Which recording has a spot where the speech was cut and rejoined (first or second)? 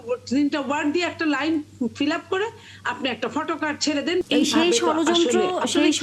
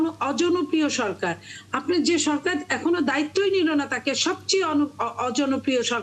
first